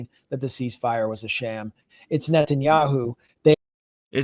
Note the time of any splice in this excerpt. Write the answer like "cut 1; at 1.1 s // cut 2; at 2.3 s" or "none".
none